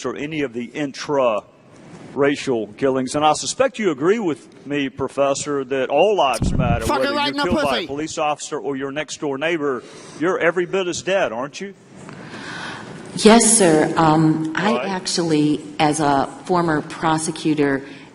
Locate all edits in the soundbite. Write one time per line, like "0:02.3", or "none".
0:16.3